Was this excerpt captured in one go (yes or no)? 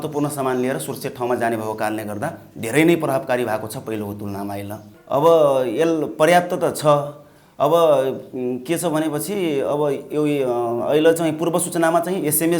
yes